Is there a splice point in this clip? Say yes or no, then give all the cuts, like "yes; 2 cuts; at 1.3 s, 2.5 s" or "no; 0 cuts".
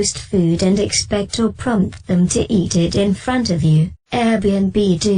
yes; 1 cut; at 4.0 s